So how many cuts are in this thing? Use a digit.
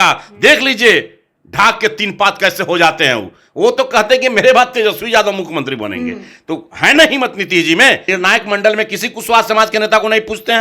1